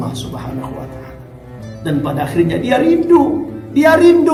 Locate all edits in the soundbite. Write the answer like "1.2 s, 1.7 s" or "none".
none